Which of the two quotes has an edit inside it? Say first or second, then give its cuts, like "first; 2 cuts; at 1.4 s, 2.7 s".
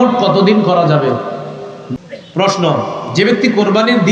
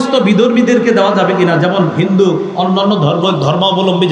first; 1 cut; at 2.0 s